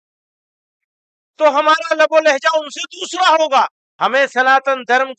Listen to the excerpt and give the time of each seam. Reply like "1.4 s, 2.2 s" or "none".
3.8 s